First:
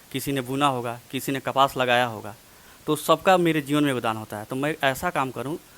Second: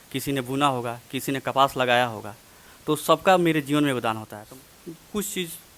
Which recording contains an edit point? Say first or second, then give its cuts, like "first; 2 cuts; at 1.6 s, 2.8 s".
second; 1 cut; at 4.3 s